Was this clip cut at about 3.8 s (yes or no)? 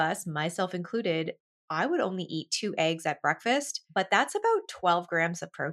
yes